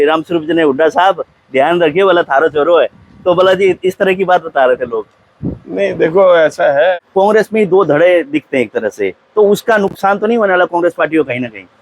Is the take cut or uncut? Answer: cut